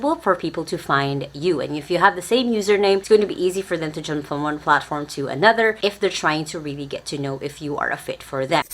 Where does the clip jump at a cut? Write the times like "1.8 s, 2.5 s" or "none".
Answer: 3.0 s, 5.8 s